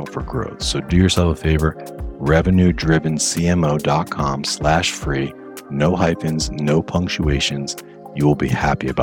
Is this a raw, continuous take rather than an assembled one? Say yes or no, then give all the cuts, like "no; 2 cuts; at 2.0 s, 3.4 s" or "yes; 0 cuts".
yes; 0 cuts